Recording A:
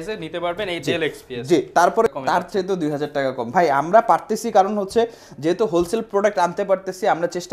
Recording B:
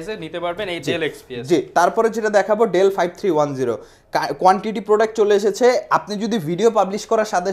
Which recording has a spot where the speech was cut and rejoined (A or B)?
A